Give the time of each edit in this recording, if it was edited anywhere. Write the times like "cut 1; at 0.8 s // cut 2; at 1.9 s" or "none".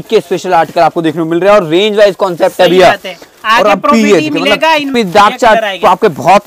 cut 1; at 4.9 s